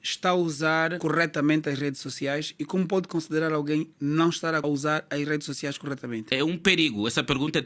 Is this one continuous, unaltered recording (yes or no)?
no